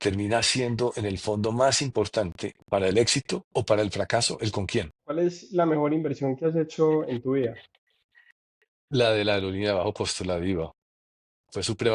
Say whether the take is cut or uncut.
cut